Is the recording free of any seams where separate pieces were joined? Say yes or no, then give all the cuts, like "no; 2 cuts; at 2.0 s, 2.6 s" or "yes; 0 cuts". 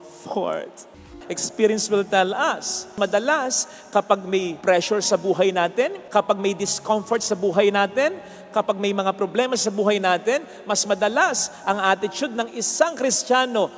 no; 4 cuts; at 1.1 s, 2.9 s, 4.5 s, 6.0 s